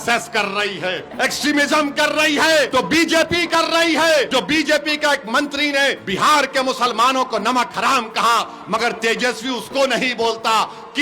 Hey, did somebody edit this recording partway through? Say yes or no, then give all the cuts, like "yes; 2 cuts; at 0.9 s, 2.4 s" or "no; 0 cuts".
yes; 4 cuts; at 1.1 s, 2.7 s, 4.3 s, 6.0 s